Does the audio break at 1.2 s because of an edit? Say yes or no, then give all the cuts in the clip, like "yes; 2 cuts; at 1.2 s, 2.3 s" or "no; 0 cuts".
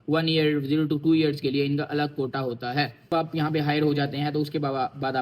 no; 1 cut; at 3.1 s